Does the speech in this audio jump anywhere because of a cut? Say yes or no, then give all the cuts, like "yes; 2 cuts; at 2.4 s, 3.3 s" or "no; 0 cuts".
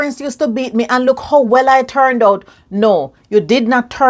no; 0 cuts